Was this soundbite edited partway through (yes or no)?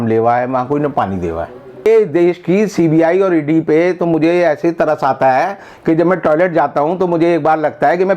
yes